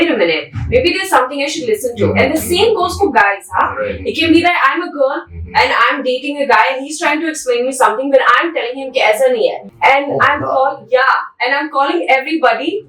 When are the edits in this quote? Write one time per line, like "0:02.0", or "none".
0:09.7